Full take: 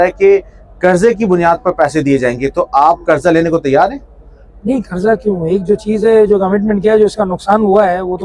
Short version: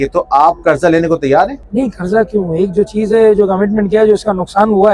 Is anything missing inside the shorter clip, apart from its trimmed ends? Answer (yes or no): yes